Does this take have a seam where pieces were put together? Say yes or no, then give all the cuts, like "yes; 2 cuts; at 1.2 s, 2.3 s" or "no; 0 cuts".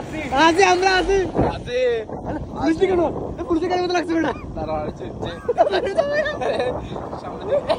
no; 0 cuts